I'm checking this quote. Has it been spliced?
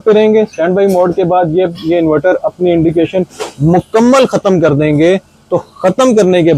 no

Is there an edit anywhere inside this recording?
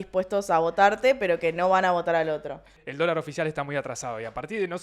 yes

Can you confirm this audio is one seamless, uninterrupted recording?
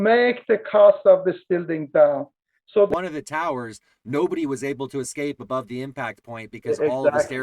no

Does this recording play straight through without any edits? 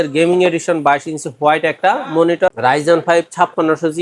no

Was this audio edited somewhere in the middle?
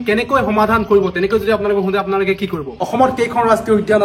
yes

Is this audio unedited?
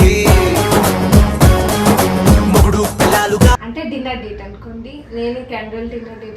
yes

